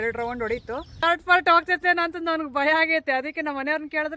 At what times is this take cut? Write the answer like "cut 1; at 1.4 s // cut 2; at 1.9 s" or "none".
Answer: cut 1; at 1.0 s